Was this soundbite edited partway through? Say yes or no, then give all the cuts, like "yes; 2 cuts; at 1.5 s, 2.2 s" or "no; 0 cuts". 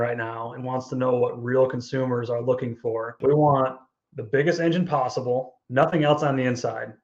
yes; 2 cuts; at 3.1 s, 5.6 s